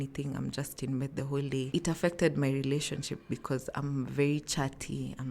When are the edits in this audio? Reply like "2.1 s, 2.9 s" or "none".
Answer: 1.7 s